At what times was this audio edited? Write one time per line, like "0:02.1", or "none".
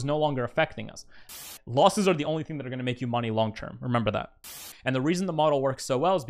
0:01.4
0:04.5